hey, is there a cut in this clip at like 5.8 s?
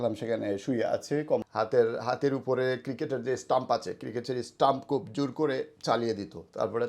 no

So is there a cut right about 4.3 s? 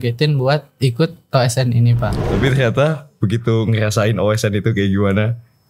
no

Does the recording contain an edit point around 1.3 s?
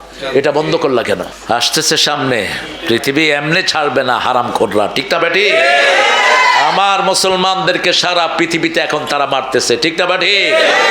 yes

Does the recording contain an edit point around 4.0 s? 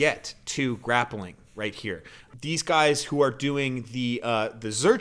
no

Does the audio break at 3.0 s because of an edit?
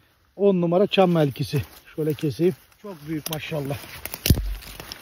yes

